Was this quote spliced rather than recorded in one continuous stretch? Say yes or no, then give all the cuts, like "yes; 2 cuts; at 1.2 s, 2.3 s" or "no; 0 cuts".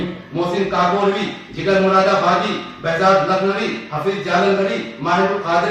no; 0 cuts